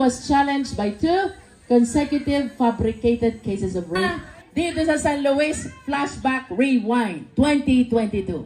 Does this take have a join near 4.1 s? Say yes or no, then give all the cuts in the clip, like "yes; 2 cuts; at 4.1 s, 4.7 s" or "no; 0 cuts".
yes; 1 cut; at 4.1 s